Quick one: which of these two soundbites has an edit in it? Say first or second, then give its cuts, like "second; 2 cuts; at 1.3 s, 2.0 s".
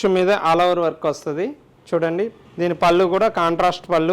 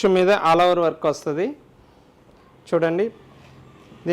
first; 2 cuts; at 1.7 s, 2.4 s